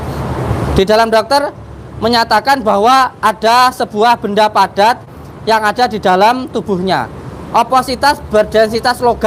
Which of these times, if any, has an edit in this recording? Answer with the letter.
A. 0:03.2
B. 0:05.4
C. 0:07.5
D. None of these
D